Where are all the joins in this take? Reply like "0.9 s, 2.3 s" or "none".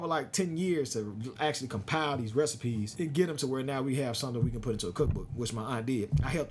2.9 s